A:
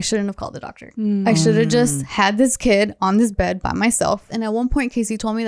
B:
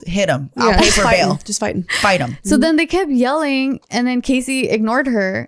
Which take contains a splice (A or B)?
A